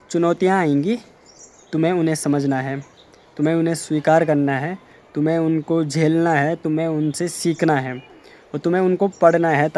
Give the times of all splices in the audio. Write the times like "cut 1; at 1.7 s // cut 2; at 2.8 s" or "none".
none